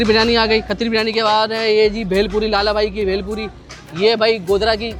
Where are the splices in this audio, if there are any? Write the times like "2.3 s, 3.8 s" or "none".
none